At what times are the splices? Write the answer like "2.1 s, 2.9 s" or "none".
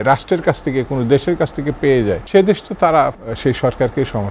2.2 s, 3.3 s